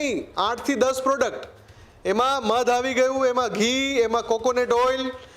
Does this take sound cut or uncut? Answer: uncut